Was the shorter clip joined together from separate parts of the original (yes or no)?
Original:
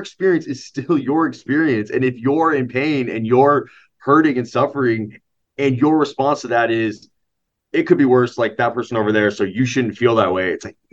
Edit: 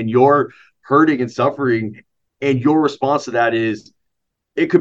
no